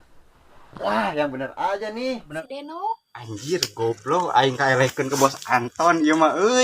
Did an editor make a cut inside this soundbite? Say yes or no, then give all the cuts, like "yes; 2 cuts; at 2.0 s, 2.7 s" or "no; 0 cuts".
yes; 1 cut; at 2.4 s